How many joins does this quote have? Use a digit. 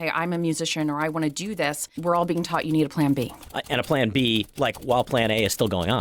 1